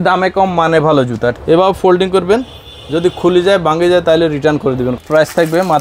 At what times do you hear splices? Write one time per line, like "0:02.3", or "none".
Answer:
0:01.4
0:05.0